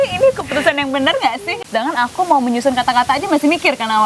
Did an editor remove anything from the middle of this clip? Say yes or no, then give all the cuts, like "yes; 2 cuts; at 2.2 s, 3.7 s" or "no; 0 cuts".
yes; 1 cut; at 1.5 s